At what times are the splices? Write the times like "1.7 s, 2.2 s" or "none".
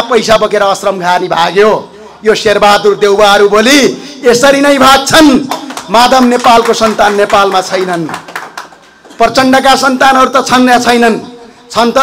none